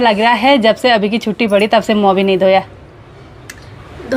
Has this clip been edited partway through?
no; 0 cuts

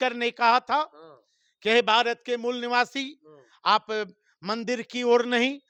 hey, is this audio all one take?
yes; 0 cuts

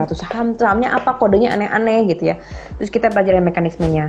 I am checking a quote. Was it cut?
no; 0 cuts

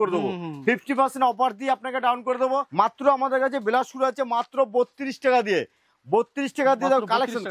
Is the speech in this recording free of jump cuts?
no; 1 cut; at 2.7 s

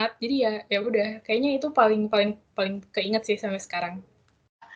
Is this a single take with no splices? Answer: yes; 0 cuts

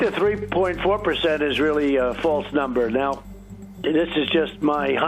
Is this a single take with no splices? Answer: no; 1 cut; at 3.2 s

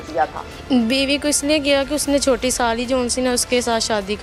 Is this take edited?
no; 0 cuts

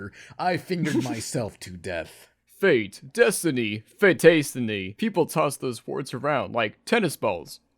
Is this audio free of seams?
no; 1 cut; at 4.9 s

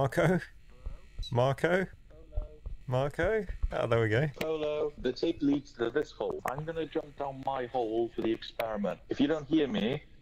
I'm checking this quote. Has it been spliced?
yes; 1 cut; at 6.4 s

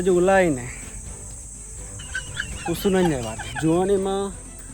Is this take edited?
yes; 1 cut; at 3.4 s

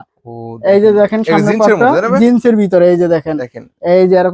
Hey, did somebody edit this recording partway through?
no; 0 cuts

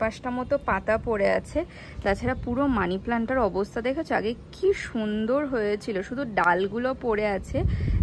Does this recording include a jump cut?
no; 0 cuts

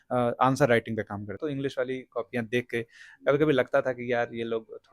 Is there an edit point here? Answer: yes; 1 cut; at 1.3 s

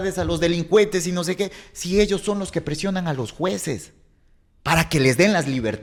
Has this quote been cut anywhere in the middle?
no; 0 cuts

